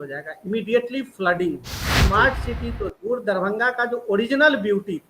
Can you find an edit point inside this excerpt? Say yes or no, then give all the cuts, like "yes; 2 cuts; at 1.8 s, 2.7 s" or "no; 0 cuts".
yes; 1 cut; at 2.0 s